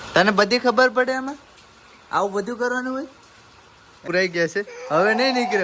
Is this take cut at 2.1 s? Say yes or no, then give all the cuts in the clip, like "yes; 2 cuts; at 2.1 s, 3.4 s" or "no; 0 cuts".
no; 1 cut; at 4.0 s